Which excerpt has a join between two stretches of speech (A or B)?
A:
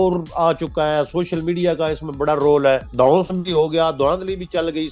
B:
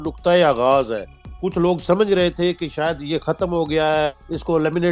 A